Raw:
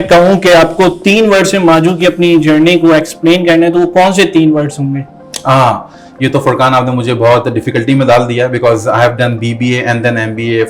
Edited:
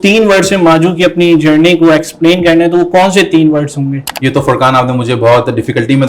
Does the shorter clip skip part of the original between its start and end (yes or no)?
yes